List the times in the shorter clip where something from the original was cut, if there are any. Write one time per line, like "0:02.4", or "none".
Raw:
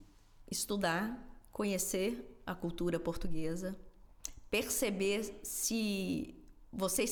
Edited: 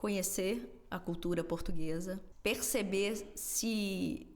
0:02.3